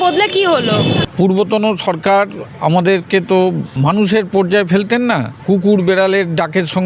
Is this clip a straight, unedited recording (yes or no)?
no